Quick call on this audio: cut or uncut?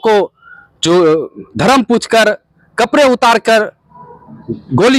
uncut